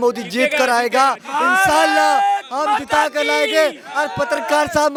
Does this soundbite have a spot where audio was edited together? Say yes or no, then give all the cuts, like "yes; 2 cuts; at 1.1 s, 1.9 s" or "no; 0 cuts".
no; 0 cuts